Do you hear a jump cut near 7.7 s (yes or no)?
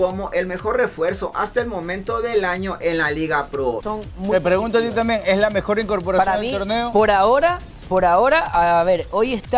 no